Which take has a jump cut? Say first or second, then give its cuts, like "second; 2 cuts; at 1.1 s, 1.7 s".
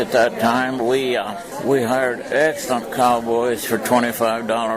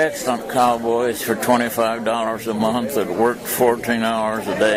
first; 1 cut; at 1.5 s